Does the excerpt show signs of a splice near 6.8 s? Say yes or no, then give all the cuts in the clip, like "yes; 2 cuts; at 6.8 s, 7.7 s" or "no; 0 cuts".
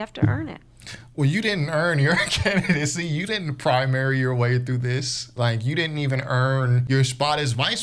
yes; 1 cut; at 6.8 s